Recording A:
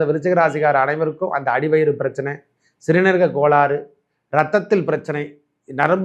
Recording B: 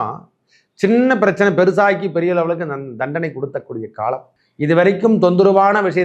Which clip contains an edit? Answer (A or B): B